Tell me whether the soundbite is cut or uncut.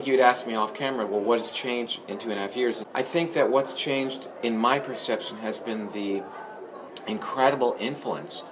cut